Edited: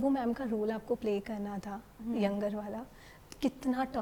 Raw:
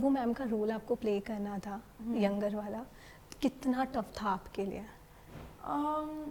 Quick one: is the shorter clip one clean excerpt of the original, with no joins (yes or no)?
yes